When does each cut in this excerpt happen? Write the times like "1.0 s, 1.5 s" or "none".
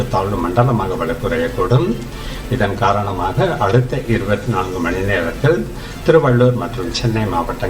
none